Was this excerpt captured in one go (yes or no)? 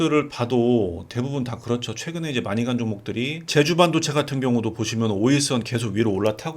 no